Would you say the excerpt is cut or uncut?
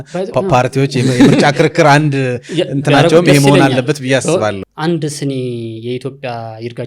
cut